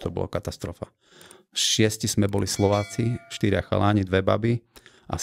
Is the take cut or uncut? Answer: uncut